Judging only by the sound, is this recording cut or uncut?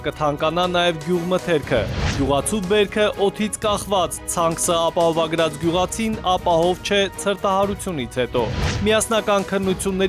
uncut